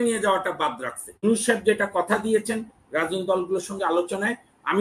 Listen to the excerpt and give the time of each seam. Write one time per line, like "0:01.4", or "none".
0:01.2